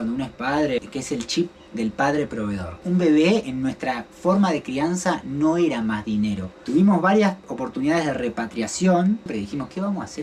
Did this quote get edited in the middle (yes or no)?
yes